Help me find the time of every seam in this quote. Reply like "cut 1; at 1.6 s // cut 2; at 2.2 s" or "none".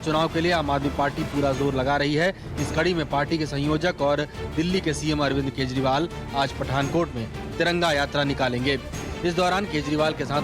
cut 1; at 6.6 s